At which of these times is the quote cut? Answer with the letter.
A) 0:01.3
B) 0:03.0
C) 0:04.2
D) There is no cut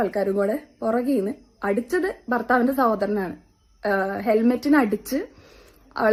D